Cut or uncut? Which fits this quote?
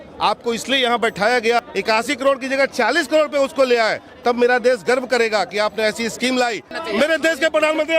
cut